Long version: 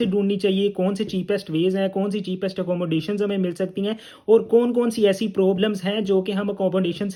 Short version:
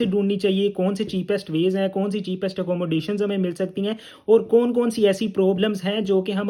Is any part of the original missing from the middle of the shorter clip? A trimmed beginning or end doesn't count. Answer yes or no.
no